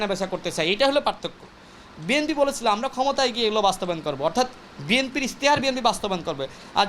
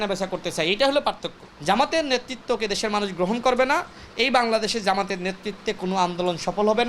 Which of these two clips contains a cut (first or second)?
second